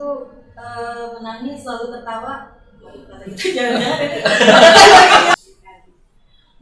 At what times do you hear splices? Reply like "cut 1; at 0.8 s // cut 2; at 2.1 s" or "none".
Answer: cut 1; at 5.3 s